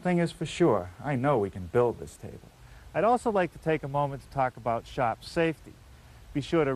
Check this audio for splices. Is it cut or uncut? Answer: uncut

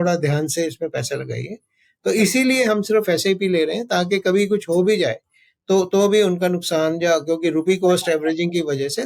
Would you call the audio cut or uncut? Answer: uncut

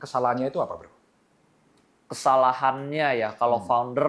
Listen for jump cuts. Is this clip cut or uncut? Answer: uncut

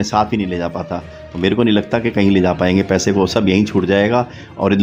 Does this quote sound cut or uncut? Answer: uncut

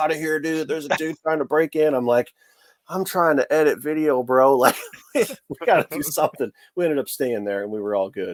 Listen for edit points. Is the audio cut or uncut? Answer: uncut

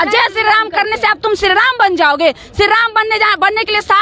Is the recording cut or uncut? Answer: uncut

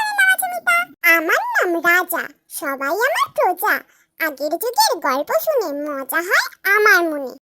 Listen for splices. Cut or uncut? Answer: cut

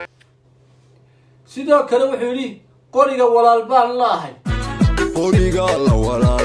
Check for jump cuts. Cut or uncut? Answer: cut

